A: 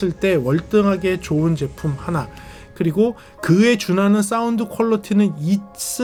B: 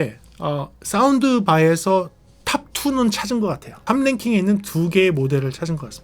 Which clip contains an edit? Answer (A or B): B